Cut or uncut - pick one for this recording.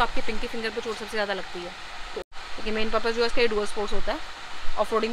cut